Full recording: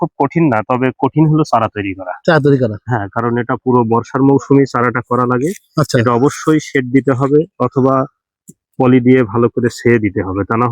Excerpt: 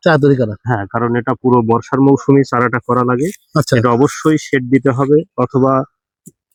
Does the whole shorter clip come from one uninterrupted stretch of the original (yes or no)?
yes